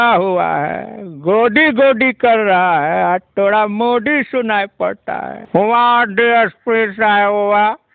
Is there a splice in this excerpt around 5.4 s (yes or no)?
yes